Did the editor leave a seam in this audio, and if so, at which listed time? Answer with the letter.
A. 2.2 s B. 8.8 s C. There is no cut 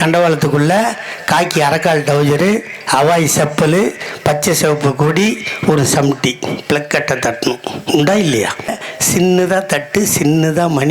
B